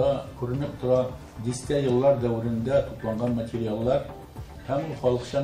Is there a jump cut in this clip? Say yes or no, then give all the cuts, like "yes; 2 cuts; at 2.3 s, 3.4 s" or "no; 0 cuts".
yes; 1 cut; at 1.3 s